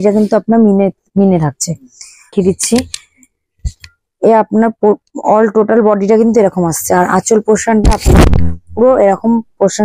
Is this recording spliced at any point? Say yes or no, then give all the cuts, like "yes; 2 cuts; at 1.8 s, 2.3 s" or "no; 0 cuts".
yes; 1 cut; at 2.3 s